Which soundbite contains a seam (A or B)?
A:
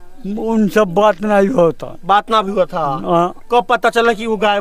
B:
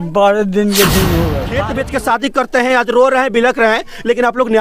B